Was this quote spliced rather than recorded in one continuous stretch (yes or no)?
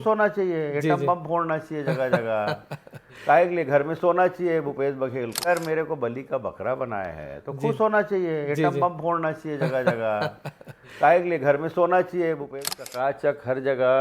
yes